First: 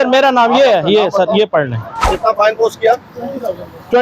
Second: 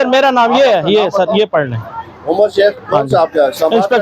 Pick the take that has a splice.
first; 1 cut; at 2.0 s

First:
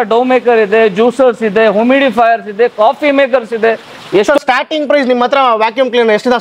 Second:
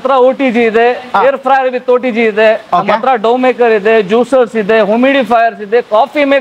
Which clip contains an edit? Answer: first; 1 cut; at 4.2 s

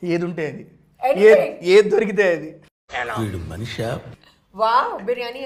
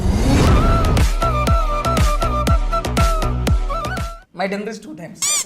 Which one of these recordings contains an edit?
second; 1 cut; at 4.1 s

